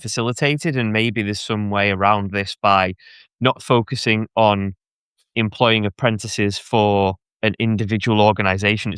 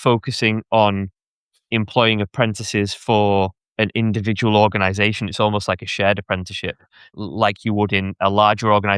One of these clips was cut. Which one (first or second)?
second